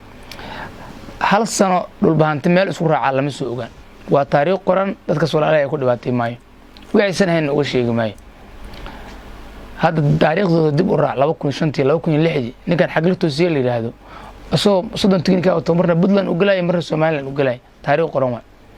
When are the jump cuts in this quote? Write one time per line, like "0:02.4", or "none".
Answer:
none

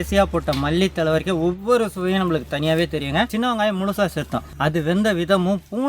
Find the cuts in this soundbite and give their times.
0:03.3
0:04.5

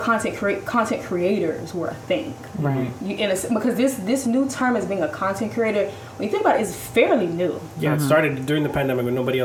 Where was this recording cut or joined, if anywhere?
none

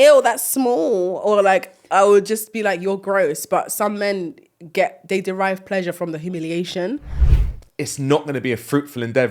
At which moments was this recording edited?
0:07.1

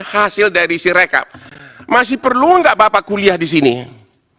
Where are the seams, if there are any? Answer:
none

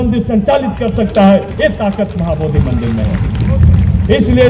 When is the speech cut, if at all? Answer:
none

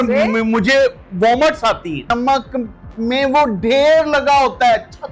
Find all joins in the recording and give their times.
0:02.1

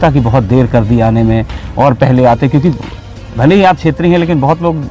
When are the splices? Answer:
none

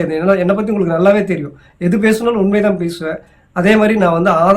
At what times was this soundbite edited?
none

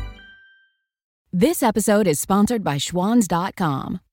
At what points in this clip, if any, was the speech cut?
0:01.1

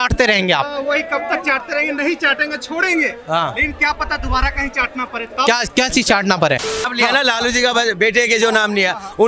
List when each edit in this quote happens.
0:06.8

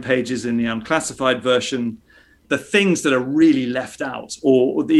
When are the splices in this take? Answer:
0:02.4

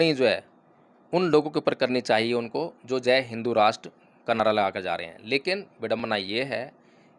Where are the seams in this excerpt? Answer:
none

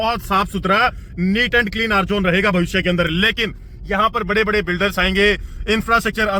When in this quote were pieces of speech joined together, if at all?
none

